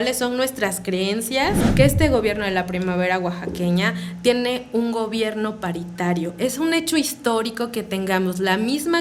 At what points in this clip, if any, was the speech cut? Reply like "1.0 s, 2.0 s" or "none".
1.6 s